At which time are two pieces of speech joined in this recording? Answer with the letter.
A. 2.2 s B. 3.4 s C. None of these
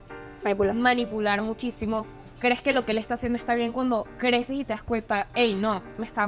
C